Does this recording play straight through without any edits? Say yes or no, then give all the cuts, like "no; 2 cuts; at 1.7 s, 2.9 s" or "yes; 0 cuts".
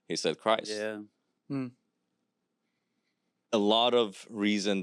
yes; 0 cuts